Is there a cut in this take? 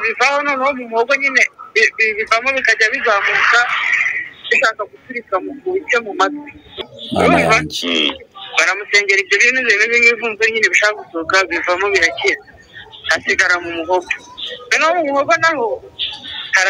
yes; 1 cut; at 6.7 s

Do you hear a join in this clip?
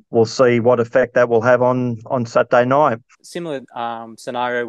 yes; 1 cut; at 3.1 s

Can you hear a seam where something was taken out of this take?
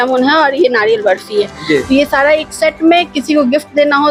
no; 0 cuts

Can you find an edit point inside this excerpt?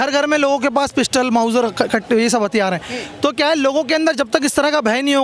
no; 0 cuts

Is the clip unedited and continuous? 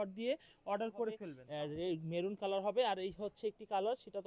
no; 1 cut; at 1.4 s

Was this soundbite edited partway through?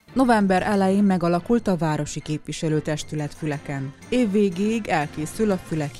no; 0 cuts

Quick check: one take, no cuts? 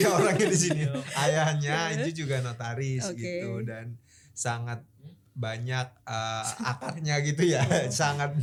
yes; 0 cuts

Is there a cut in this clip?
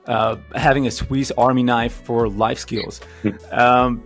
no; 0 cuts

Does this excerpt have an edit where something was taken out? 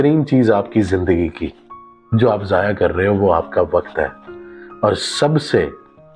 no; 0 cuts

